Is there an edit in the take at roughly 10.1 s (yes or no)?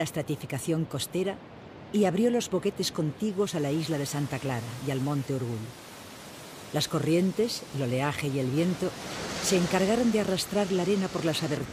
no